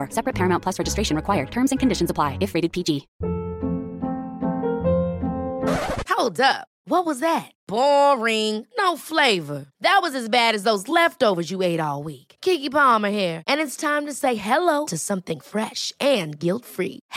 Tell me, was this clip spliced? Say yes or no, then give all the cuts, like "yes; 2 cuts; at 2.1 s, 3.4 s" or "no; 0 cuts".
yes; 1 cut; at 3.1 s